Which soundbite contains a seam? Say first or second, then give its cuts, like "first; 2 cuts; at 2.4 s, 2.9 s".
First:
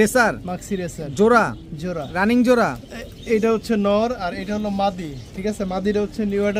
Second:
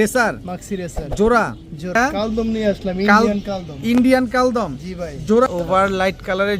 second; 2 cuts; at 1.9 s, 5.5 s